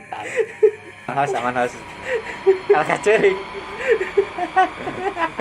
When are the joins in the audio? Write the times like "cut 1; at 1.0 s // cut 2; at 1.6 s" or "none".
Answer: cut 1; at 1.1 s